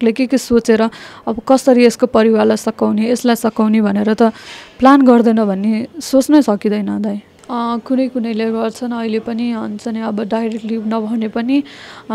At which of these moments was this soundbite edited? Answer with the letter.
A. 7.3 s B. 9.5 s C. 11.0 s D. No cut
A